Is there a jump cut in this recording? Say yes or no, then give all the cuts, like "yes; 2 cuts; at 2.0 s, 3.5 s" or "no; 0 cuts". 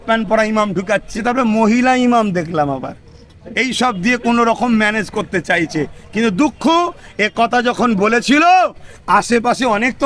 no; 0 cuts